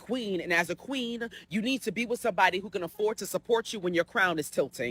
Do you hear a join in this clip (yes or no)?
no